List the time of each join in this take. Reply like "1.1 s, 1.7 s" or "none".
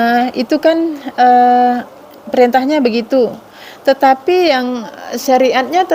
none